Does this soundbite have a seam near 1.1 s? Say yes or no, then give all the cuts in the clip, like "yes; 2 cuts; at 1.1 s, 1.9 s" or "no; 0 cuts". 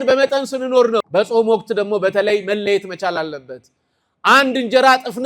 yes; 1 cut; at 1.1 s